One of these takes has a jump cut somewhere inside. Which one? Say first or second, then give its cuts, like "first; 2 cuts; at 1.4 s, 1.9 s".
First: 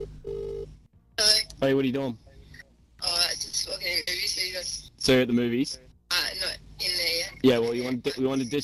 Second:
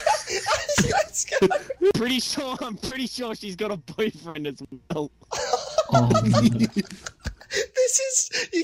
second; 1 cut; at 1.9 s